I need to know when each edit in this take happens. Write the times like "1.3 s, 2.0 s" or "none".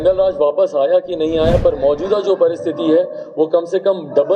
none